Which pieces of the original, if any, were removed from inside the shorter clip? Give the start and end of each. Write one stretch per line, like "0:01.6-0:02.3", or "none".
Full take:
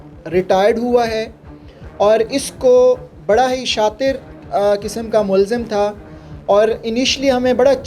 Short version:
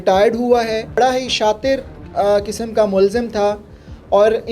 0:01.4-0:03.3